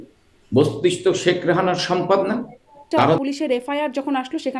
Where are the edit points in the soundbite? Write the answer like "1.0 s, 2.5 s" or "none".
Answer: 3.2 s